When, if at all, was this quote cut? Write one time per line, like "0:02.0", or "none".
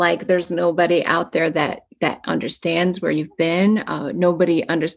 none

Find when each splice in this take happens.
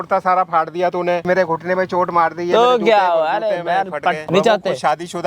0:01.3
0:04.2

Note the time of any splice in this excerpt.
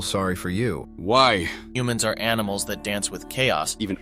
0:00.9
0:01.7

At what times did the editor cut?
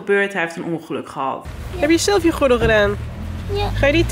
0:01.5

